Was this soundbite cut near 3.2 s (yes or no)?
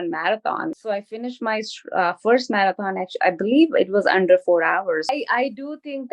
no